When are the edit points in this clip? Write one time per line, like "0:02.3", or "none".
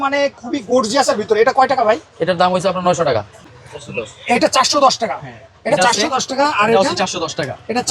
0:03.4